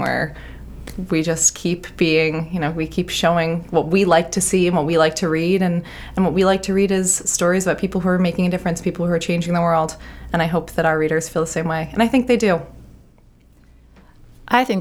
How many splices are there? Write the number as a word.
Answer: zero